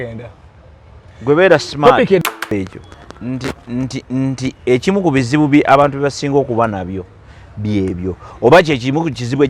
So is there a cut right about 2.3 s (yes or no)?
yes